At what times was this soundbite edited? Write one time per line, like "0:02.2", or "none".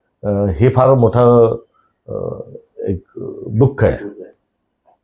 none